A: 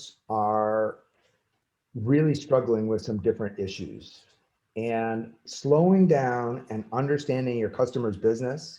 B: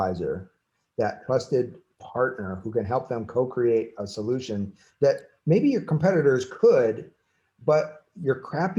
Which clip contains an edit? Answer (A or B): A